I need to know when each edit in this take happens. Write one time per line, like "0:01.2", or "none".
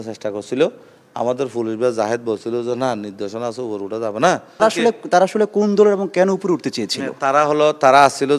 0:04.6